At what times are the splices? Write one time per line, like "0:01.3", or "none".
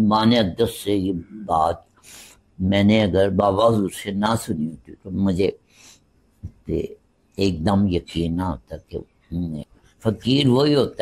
0:09.8

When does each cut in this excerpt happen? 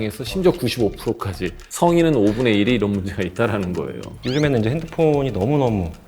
0:04.1

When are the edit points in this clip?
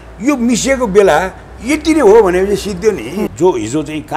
0:03.2

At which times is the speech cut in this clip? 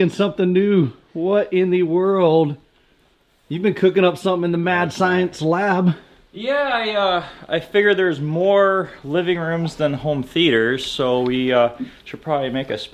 none

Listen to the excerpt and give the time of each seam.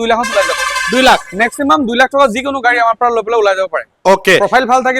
none

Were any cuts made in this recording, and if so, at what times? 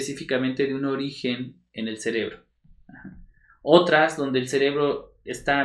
none

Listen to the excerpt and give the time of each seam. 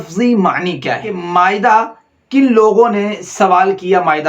0:01.2

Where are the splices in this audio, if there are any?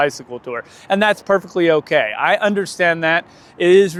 none

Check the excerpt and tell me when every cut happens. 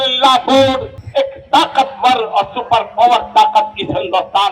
0:00.9

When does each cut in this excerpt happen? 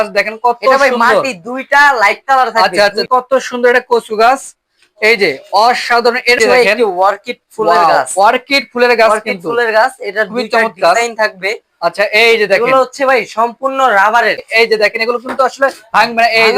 0:03.0
0:06.4
0:14.5

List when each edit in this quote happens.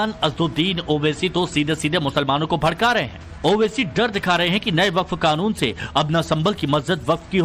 0:02.6

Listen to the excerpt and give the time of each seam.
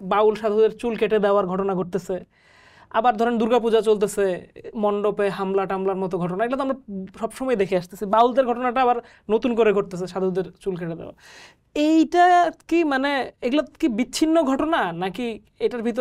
none

